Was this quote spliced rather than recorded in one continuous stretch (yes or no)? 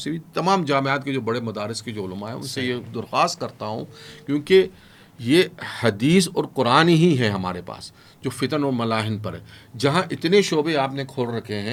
no